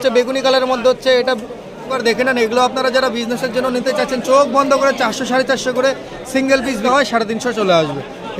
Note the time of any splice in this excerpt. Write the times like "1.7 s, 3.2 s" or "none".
1.9 s, 6.8 s

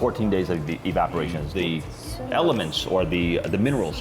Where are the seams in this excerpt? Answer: 1.4 s

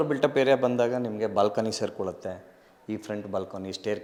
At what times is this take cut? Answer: none

